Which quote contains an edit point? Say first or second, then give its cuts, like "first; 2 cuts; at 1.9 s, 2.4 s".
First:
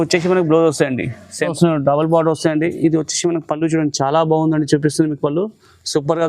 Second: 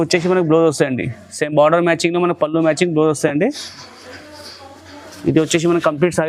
first; 1 cut; at 1.5 s